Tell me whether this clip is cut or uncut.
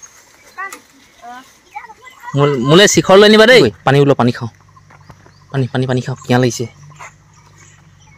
cut